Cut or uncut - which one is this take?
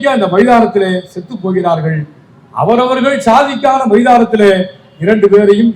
uncut